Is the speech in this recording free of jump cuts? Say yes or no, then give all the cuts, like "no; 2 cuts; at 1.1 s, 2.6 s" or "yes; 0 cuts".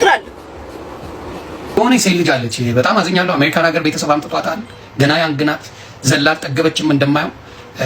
no; 1 cut; at 1.8 s